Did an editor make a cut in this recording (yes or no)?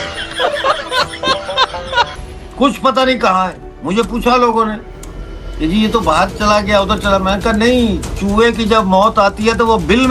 no